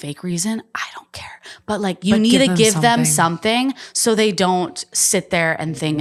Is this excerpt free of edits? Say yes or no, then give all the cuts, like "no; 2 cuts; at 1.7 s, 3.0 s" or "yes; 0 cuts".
yes; 0 cuts